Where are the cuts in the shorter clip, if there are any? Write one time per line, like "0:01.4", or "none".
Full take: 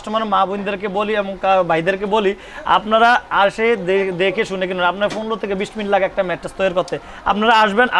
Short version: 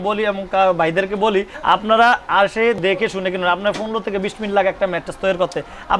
0:01.5
0:02.8